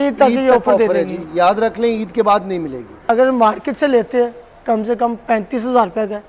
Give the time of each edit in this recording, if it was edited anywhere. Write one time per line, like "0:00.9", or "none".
0:03.0